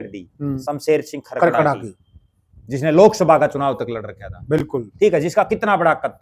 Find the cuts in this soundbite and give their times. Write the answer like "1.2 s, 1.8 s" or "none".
none